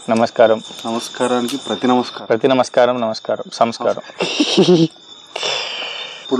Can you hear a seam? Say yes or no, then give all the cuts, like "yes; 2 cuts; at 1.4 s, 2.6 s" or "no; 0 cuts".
no; 0 cuts